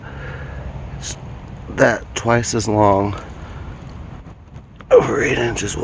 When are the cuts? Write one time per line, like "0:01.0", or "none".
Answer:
none